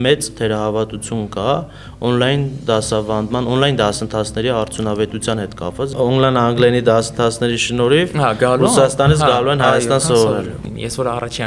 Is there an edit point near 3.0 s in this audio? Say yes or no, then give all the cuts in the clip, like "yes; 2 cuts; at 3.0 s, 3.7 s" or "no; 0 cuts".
no; 2 cuts; at 5.9 s, 10.6 s